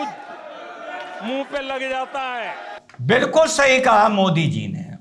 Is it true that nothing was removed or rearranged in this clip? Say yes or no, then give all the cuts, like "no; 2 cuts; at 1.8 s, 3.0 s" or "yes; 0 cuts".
yes; 0 cuts